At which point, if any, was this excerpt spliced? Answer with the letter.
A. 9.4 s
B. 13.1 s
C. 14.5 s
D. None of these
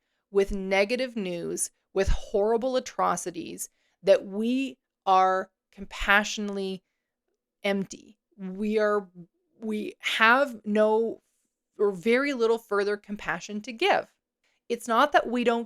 C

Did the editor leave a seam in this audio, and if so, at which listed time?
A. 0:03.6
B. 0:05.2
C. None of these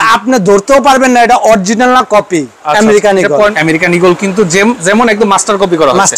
A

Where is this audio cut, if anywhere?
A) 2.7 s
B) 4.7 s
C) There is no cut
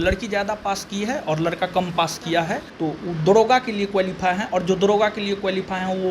A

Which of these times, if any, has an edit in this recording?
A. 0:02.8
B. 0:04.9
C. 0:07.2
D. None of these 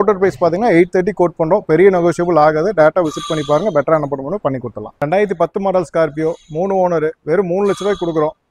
B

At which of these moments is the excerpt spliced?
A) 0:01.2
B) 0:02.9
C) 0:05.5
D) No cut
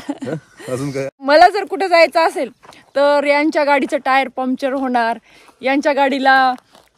A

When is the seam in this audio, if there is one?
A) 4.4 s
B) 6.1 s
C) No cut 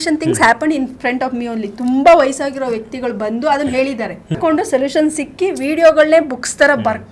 A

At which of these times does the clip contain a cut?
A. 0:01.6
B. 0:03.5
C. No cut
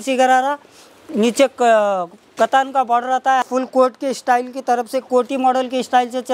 B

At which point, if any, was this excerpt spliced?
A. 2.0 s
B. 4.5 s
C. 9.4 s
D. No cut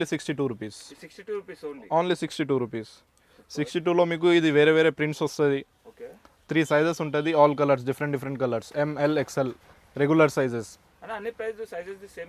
D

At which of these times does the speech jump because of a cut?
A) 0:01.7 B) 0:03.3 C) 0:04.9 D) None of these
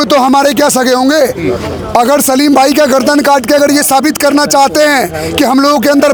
D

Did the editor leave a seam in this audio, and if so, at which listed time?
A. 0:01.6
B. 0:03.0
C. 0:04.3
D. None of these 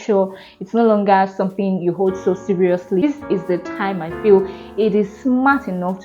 B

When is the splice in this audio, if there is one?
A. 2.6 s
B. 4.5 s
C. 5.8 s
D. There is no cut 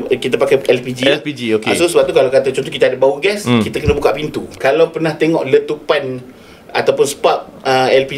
B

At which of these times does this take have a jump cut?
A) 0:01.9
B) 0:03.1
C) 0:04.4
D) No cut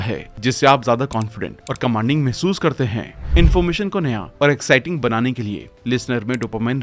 B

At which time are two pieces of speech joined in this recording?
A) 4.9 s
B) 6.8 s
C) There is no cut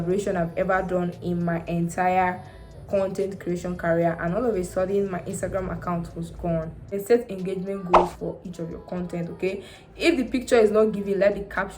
B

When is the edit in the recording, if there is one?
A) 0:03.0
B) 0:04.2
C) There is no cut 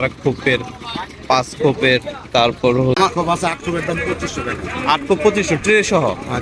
A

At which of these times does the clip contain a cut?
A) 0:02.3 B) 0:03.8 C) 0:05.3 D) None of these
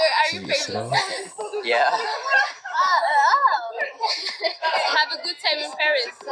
D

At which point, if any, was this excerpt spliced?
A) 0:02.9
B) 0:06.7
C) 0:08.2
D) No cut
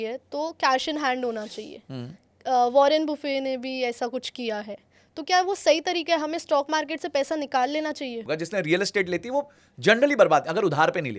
C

